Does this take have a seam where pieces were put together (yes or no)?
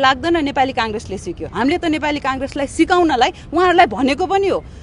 no